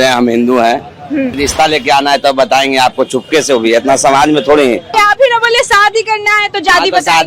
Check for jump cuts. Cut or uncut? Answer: cut